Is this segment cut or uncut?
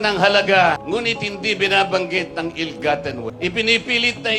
cut